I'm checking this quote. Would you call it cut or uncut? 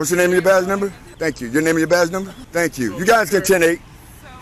cut